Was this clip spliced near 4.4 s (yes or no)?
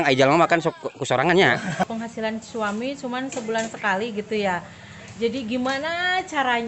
no